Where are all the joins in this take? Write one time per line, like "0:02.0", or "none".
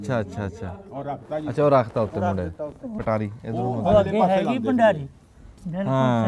0:02.9